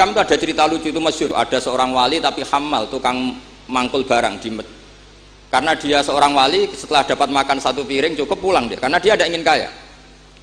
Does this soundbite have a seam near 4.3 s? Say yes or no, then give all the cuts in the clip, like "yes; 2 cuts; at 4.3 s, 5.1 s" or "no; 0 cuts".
no; 1 cut; at 1.3 s